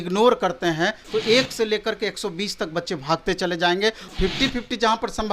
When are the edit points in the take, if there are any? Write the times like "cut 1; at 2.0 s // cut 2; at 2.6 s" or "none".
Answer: cut 1; at 1.0 s // cut 2; at 4.1 s